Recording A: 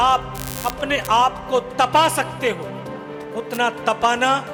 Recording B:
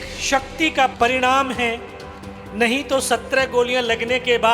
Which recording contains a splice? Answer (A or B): B